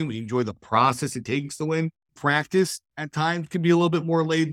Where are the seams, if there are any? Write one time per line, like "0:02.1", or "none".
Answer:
0:02.0